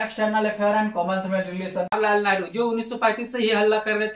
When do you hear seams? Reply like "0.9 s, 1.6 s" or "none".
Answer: 2.0 s